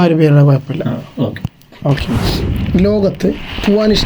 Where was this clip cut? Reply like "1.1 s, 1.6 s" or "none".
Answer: 2.0 s